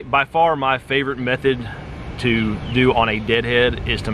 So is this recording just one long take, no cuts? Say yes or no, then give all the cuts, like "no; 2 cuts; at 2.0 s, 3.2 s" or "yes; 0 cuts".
yes; 0 cuts